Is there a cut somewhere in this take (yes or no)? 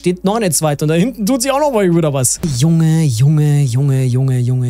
yes